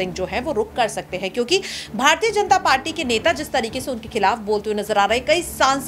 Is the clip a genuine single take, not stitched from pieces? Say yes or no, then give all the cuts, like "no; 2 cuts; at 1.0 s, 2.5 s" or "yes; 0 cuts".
yes; 0 cuts